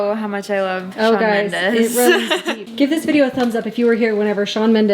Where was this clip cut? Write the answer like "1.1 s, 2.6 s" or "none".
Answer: 2.7 s